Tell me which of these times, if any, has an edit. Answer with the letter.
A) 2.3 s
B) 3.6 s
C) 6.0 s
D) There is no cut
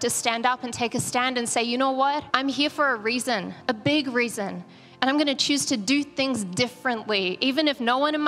A